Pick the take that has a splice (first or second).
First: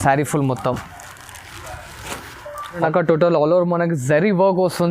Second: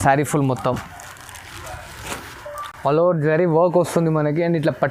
first